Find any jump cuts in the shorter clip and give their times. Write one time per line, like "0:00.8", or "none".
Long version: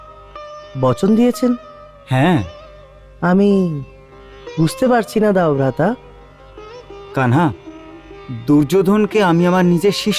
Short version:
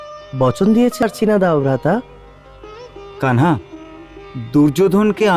0:01.0